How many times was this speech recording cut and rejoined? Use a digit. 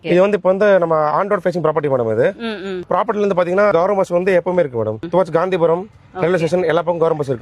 1